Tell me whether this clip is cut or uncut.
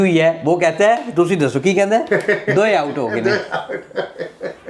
uncut